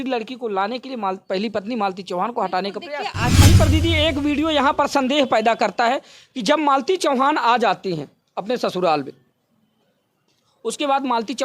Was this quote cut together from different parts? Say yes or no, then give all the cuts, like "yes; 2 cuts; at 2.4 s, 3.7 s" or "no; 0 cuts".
yes; 1 cut; at 3.4 s